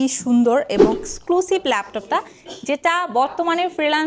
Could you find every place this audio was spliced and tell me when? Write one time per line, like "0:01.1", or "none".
0:00.9